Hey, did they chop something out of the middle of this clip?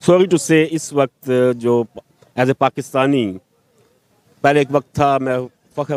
no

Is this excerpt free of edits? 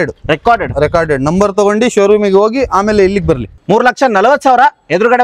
no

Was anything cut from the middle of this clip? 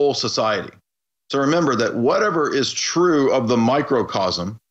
yes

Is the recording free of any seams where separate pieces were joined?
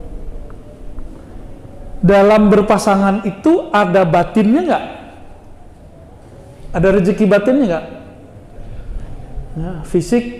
yes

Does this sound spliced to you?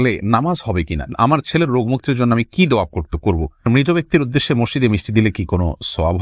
yes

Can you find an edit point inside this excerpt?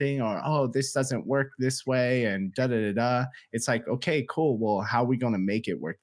no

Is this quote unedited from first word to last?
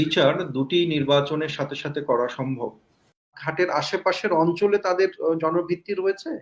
no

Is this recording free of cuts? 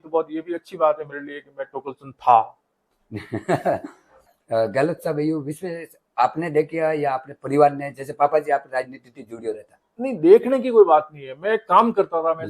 no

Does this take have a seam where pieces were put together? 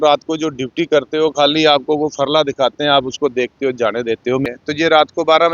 yes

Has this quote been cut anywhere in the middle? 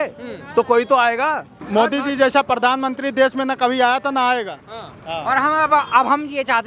yes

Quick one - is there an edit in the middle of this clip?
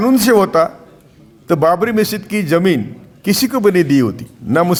no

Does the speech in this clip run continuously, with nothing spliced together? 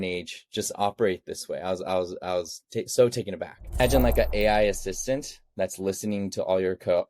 no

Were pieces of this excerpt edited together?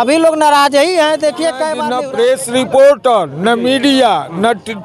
yes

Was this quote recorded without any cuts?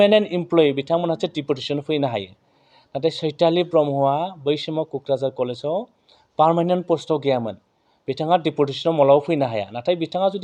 yes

